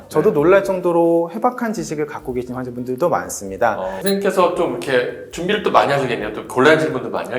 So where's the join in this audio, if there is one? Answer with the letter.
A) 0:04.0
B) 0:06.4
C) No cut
A